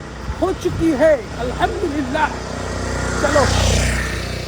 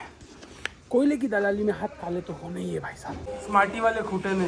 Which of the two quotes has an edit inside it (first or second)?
second